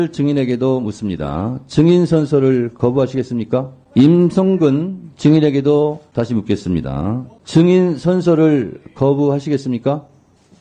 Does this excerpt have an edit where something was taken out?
yes; 3 cuts; at 3.8 s, 6.0 s, 7.3 s

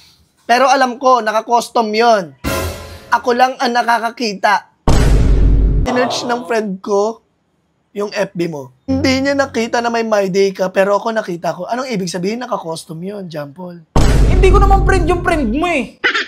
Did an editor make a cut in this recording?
yes; 2 cuts; at 5.9 s, 8.9 s

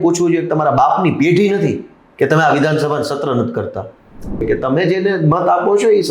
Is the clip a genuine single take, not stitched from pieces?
no; 1 cut; at 4.4 s

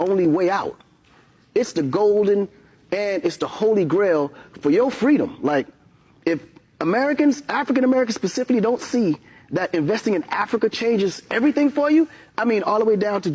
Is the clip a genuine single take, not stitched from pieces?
yes; 0 cuts

